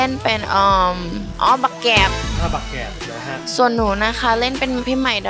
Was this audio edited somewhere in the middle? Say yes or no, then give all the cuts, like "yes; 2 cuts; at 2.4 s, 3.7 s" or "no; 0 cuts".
no; 0 cuts